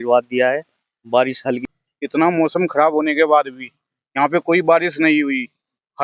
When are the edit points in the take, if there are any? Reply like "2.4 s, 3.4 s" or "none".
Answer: 1.6 s